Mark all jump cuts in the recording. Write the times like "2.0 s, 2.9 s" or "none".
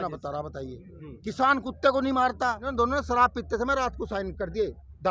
2.6 s